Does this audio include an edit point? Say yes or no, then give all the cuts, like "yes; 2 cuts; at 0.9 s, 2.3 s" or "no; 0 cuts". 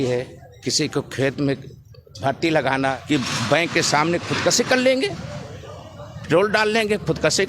yes; 1 cut; at 3.0 s